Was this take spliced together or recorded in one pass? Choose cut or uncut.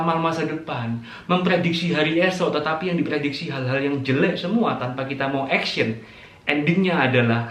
uncut